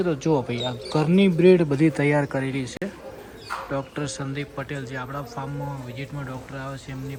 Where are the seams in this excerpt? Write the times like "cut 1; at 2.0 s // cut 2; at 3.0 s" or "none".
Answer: none